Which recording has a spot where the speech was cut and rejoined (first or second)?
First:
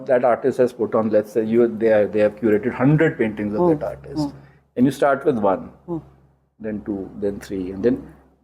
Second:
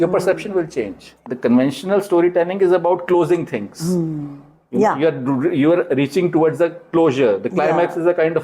second